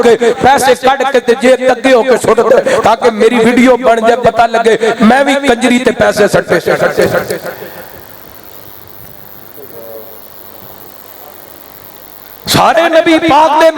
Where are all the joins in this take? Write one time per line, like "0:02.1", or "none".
none